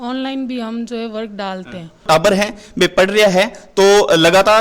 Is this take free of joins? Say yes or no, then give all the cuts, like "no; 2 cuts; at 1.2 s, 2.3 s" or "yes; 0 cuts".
no; 1 cut; at 2.0 s